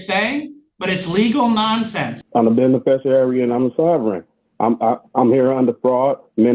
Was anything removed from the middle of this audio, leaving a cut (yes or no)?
yes